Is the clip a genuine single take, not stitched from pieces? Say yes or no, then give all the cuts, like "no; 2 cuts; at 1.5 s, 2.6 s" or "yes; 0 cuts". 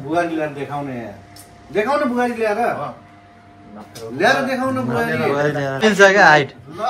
no; 1 cut; at 5.8 s